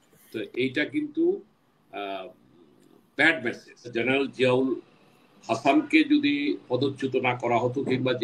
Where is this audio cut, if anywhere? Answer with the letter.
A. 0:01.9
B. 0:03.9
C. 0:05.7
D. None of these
B